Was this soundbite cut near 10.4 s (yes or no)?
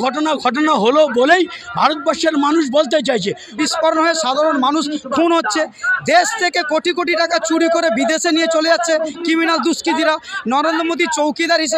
no